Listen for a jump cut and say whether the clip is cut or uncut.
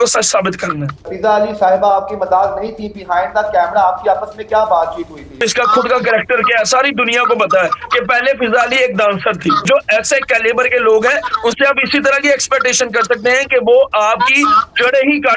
cut